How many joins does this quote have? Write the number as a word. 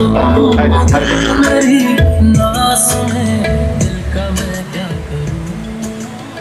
zero